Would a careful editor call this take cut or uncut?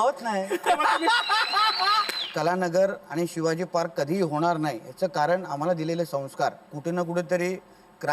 cut